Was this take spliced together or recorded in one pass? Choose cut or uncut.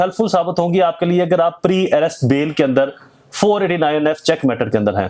uncut